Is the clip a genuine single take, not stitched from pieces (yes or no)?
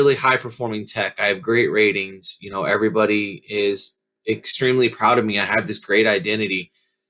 yes